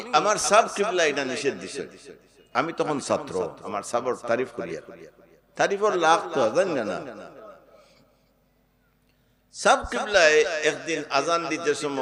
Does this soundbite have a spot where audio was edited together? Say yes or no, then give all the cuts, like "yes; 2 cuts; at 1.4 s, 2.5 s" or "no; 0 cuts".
no; 0 cuts